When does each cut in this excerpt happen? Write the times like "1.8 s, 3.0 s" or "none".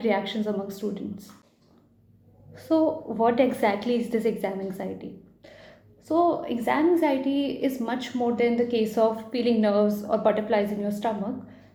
none